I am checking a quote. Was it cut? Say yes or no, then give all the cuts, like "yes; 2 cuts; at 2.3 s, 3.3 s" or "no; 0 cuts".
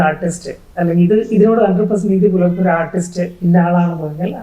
yes; 1 cut; at 3.3 s